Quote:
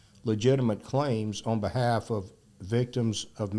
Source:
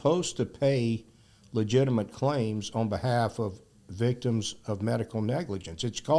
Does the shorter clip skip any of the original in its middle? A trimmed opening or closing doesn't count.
no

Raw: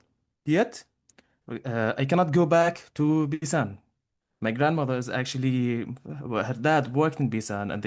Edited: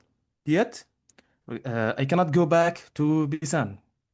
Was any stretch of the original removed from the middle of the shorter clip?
no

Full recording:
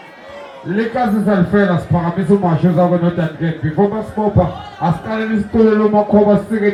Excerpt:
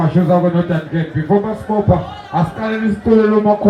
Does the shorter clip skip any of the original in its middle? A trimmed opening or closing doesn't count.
no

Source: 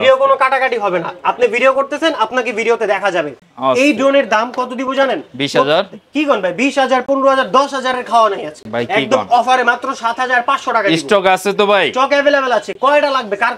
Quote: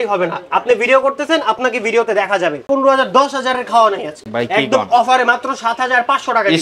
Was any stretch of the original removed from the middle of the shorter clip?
yes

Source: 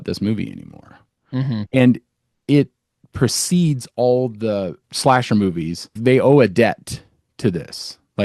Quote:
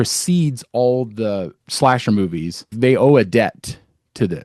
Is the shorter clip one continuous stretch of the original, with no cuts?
yes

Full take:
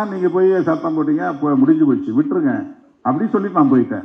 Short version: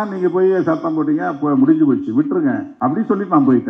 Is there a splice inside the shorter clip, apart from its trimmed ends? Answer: yes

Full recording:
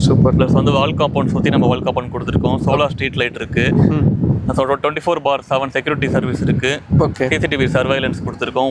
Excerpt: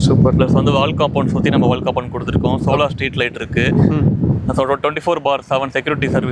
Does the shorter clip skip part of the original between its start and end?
no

